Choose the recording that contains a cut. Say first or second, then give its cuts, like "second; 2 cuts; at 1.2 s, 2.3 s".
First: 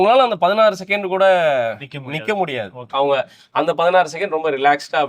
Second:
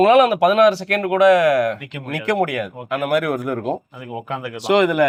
first; 1 cut; at 2.8 s